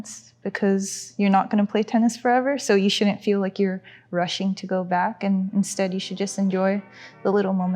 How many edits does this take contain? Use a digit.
0